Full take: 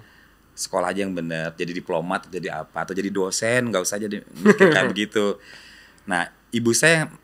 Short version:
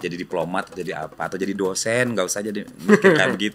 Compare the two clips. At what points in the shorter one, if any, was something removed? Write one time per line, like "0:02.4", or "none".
none